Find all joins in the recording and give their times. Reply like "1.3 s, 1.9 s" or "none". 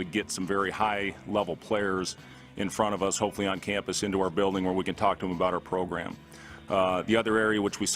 none